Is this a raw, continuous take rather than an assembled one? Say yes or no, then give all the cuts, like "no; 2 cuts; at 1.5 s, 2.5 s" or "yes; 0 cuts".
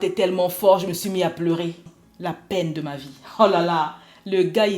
no; 1 cut; at 1.9 s